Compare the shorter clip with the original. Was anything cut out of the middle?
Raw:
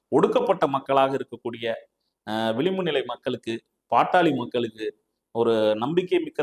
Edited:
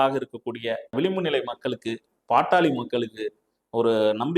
yes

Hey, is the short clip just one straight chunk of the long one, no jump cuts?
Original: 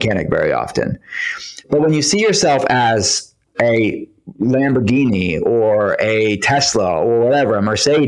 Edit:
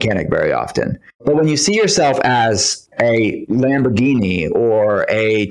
no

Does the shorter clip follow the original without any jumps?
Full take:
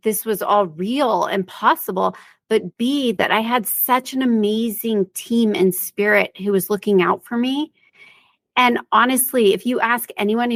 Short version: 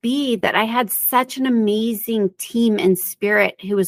yes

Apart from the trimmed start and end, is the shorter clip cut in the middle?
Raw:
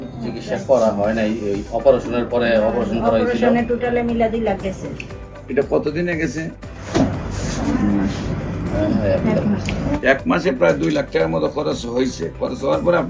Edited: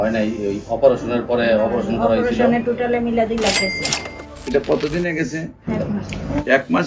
yes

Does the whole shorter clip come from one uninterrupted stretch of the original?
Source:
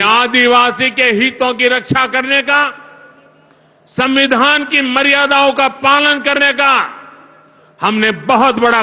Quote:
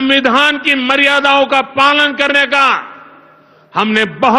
yes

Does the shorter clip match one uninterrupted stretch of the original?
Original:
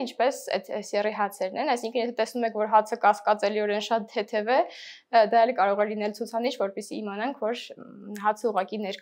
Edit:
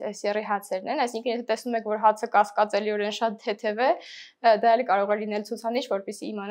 yes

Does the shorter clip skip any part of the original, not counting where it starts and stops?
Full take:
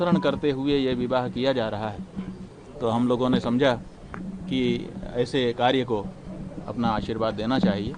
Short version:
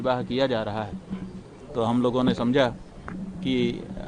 no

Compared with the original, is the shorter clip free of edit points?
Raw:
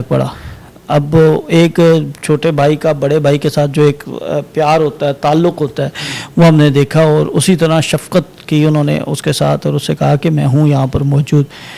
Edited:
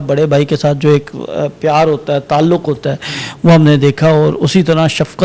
yes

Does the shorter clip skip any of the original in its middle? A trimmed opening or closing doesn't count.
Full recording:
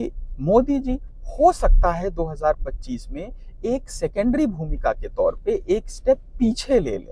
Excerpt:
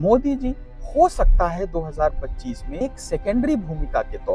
yes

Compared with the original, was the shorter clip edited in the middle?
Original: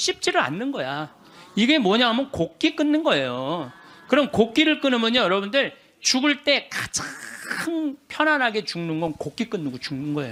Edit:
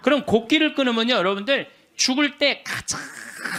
no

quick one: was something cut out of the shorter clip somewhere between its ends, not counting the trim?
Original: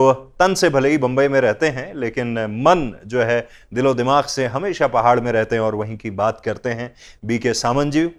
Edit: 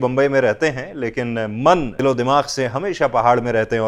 yes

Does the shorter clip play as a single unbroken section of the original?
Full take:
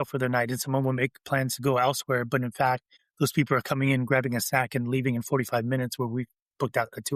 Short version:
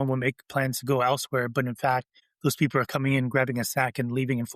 yes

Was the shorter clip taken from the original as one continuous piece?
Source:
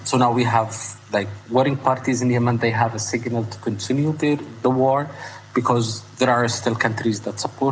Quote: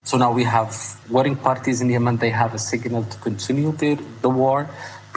no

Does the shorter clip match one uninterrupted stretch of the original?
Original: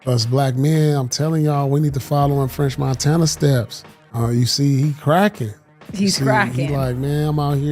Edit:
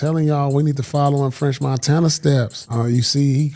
no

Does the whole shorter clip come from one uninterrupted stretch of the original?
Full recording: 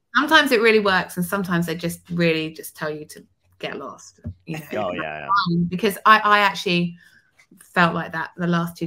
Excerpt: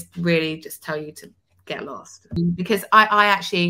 no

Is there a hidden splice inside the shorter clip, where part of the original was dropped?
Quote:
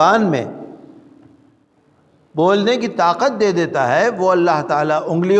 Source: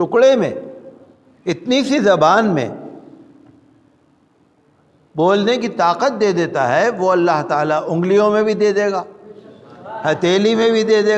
yes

